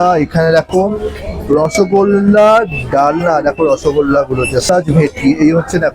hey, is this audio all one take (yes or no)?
no